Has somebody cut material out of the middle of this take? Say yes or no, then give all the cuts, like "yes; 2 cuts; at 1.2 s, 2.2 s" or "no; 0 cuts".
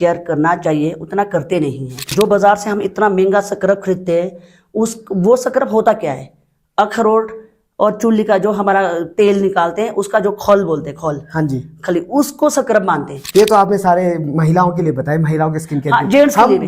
yes; 2 cuts; at 2.1 s, 13.2 s